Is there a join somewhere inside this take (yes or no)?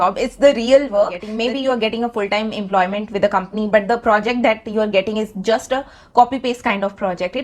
yes